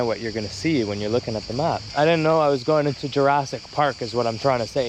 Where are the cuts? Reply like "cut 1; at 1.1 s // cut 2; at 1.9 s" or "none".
cut 1; at 1.8 s